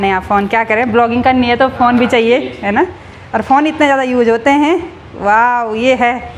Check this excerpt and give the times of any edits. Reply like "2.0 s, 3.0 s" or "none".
none